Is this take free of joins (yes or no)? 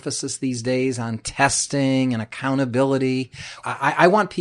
no